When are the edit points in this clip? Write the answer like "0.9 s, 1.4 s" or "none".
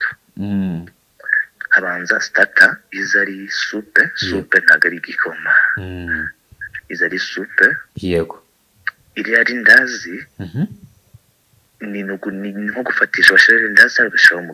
none